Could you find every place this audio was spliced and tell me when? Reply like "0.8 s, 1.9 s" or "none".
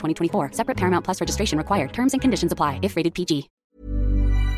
3.6 s